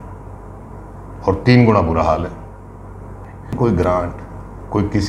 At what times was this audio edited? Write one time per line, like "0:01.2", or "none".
0:03.6